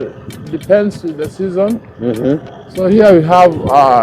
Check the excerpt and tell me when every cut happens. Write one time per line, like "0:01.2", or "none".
0:02.6